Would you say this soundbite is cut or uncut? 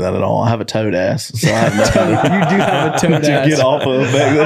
uncut